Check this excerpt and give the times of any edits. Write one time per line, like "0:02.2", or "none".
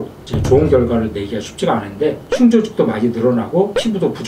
0:02.2